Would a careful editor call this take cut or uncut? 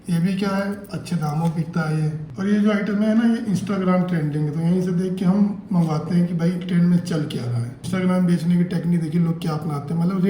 uncut